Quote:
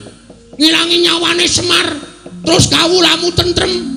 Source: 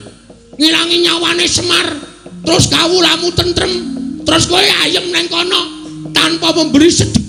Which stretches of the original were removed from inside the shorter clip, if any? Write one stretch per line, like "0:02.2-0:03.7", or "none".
none